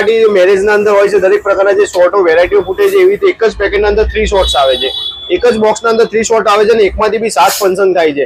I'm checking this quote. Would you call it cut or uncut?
uncut